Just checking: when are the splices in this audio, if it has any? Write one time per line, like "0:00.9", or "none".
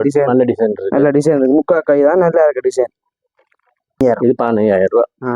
0:04.0